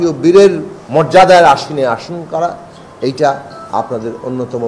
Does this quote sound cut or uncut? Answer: uncut